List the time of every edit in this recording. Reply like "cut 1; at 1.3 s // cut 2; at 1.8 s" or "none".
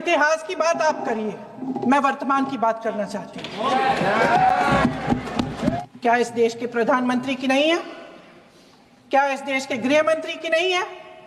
cut 1; at 5.8 s